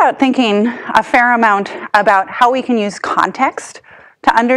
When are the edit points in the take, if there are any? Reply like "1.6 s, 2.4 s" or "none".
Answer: 3.1 s